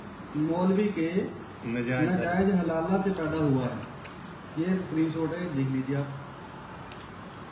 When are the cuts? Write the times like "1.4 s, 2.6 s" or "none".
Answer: none